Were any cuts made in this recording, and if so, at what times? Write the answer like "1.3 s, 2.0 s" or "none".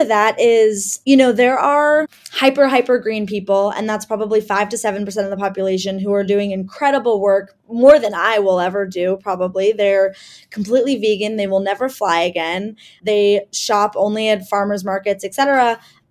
none